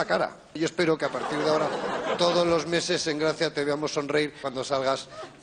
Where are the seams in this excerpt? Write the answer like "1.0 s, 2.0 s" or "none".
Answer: 0.9 s